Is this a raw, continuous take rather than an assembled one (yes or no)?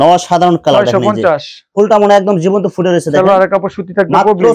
yes